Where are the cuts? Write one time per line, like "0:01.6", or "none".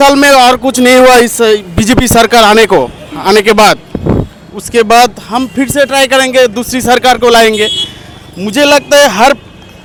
none